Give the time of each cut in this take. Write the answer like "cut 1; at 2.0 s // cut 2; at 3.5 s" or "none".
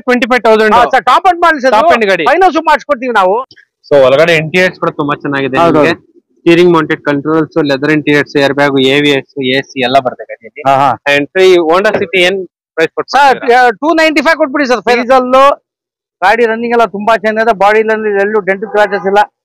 cut 1; at 3.4 s // cut 2; at 15.0 s